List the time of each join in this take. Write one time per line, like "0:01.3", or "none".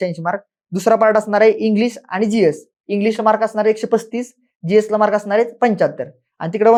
none